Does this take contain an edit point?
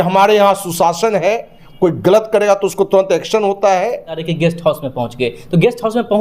yes; 1 cut; at 4.3 s

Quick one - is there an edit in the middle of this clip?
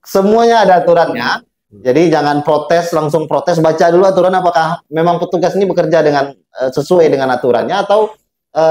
no; 0 cuts

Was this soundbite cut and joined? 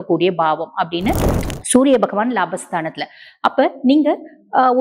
yes; 1 cut; at 1.3 s

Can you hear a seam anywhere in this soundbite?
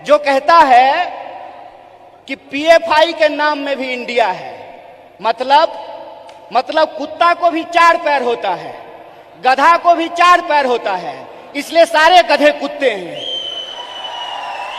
no; 0 cuts

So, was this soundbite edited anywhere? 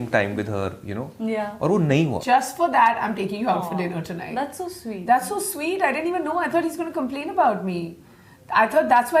yes; 1 cut; at 2.2 s

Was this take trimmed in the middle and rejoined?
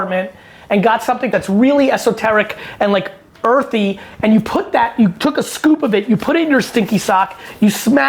yes; 1 cut; at 1.3 s

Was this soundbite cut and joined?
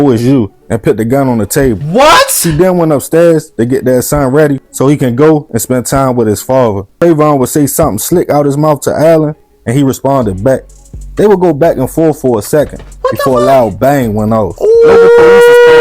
yes; 1 cut; at 6.9 s

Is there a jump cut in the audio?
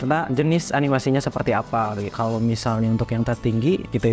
no; 0 cuts

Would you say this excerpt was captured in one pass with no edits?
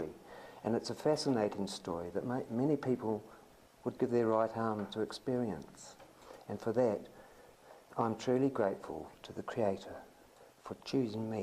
no; 1 cut; at 5.2 s

